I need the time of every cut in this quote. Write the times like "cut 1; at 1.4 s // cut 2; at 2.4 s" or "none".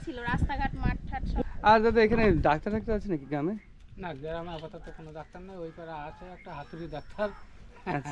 cut 1; at 1.4 s

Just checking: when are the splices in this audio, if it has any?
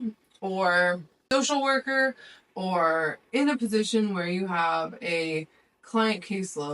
cut 1; at 1.2 s

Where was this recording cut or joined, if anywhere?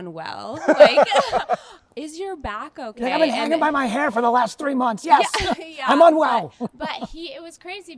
none

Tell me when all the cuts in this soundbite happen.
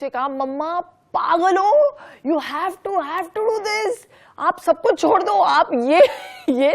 none

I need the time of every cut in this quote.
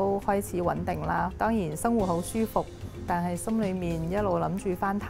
cut 1; at 1.3 s

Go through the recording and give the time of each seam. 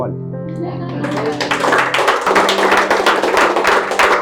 none

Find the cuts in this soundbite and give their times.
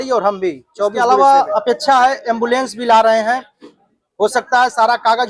cut 1; at 1.0 s

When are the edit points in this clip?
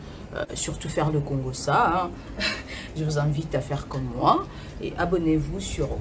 none

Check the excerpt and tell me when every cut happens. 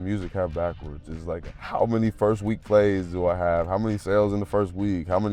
cut 1; at 1.4 s

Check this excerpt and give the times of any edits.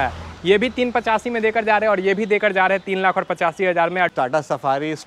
cut 1; at 4.1 s

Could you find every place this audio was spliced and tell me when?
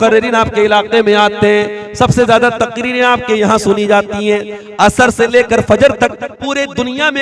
none

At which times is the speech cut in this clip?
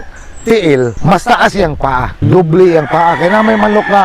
cut 1; at 1.0 s // cut 2; at 2.2 s

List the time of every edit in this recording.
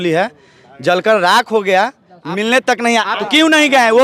cut 1; at 3.1 s

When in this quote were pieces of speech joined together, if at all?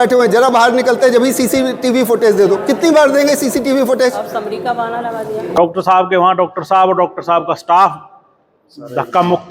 cut 1; at 5.5 s

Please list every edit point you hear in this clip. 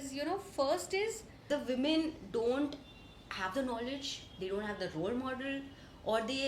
cut 1; at 1.4 s

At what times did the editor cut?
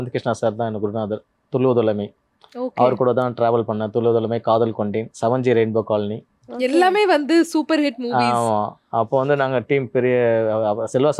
none

